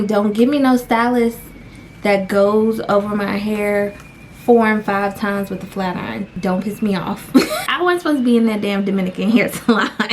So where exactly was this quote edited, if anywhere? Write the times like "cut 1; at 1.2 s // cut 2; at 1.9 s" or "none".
cut 1; at 6.3 s // cut 2; at 7.6 s